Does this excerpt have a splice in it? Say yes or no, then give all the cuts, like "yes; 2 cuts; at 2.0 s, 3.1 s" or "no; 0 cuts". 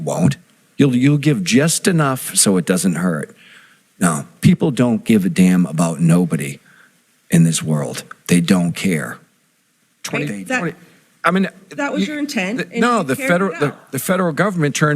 yes; 1 cut; at 9.5 s